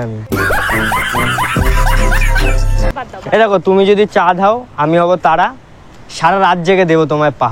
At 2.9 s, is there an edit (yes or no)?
yes